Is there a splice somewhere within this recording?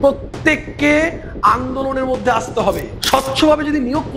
yes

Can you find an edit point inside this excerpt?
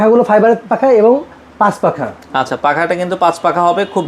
no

